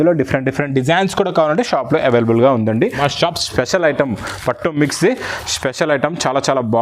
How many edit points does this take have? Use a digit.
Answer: 1